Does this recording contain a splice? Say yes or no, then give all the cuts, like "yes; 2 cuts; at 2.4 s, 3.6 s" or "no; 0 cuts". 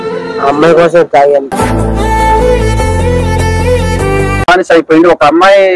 yes; 1 cut; at 4.5 s